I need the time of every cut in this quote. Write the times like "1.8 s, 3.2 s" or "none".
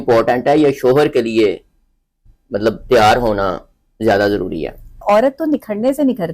5.0 s